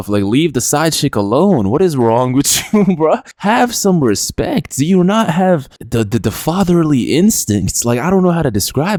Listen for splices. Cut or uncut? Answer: uncut